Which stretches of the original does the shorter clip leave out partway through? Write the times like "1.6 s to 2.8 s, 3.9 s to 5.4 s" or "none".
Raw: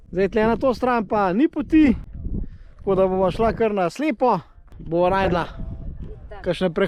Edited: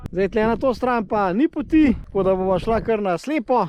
2.1 s to 2.8 s